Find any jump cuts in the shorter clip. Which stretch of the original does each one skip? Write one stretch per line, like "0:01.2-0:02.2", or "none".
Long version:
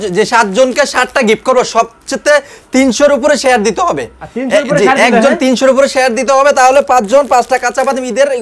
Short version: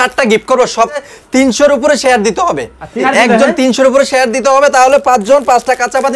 0:02.1-0:02.5
0:04.4-0:04.9